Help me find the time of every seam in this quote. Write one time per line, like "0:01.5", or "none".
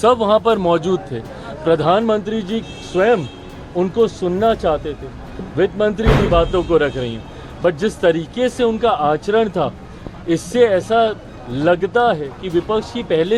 0:06.2